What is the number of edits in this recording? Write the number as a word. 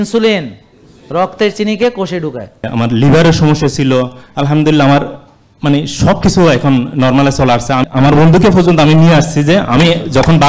two